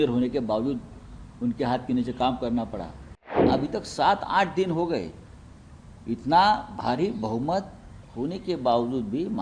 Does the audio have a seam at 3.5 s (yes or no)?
yes